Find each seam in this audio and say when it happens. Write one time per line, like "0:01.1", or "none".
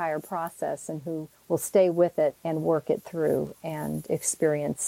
0:01.3
0:02.4